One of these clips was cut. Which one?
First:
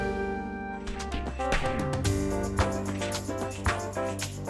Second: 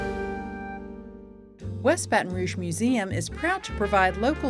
second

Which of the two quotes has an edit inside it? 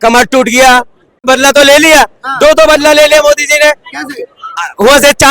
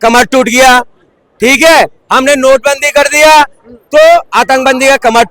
first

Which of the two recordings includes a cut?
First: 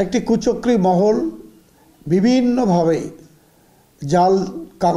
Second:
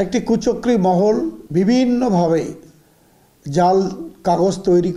second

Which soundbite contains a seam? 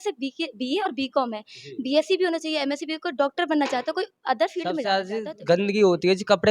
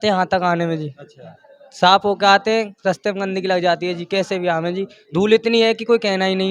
first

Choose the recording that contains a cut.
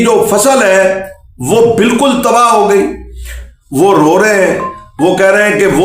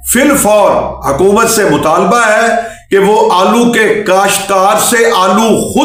first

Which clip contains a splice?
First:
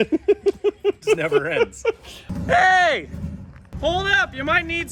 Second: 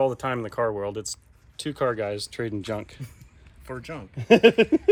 first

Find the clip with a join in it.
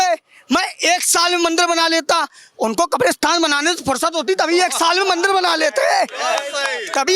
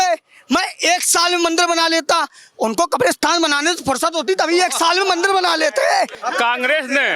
second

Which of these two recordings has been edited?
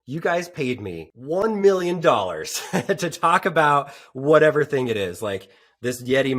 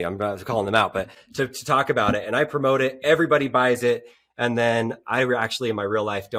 first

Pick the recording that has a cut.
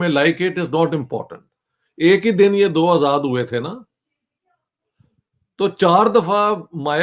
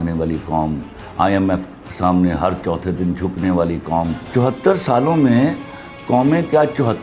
second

